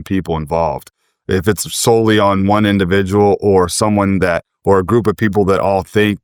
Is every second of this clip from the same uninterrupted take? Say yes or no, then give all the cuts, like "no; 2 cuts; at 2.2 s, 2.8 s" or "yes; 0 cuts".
yes; 0 cuts